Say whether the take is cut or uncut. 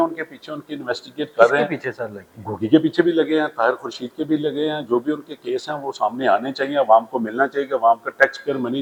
uncut